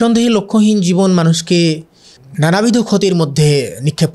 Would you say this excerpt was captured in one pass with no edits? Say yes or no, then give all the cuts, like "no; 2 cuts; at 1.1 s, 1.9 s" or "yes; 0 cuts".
yes; 0 cuts